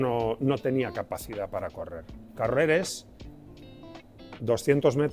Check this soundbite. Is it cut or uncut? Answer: uncut